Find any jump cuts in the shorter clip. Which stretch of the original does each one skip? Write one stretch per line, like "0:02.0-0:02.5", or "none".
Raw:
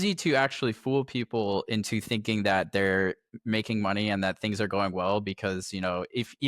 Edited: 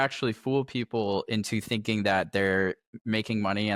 none